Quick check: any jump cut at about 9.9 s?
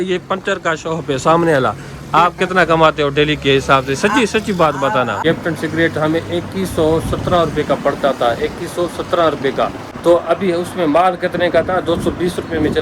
yes; 2 cuts; at 5.2 s, 9.9 s

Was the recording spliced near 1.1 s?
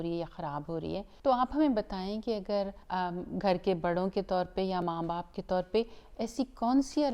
yes; 2 cuts; at 1.1 s, 2.8 s

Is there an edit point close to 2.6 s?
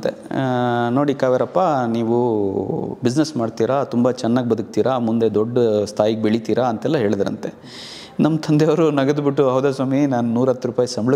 no; 0 cuts

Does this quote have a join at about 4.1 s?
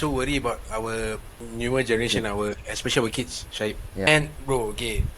yes; 2 cuts; at 1.4 s, 4.1 s

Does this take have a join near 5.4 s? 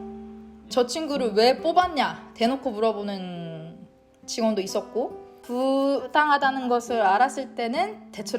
yes; 1 cut; at 5.4 s

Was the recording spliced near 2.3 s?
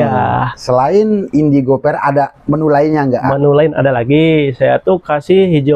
no; 0 cuts

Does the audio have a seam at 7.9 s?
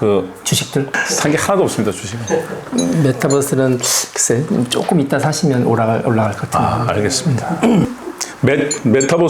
yes; 2 cuts; at 0.9 s, 7.9 s

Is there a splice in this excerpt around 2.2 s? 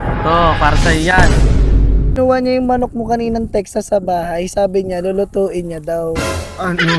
yes; 1 cut; at 2.2 s

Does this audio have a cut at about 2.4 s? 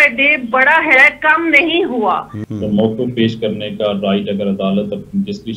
yes; 1 cut; at 2.4 s

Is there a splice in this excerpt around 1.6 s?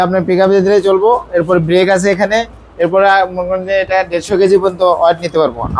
no; 0 cuts

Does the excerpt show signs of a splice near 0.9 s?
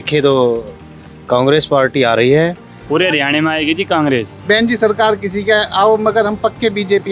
no; 2 cuts; at 2.7 s, 4.3 s

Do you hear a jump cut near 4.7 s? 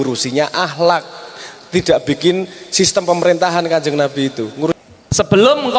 yes; 1 cut; at 4.7 s

